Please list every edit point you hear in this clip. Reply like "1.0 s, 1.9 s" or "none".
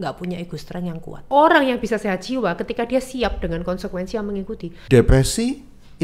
1.3 s, 4.7 s